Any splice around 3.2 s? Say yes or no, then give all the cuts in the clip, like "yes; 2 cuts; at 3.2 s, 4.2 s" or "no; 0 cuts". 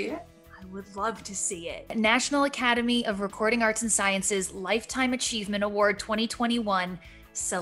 no; 1 cut; at 1.9 s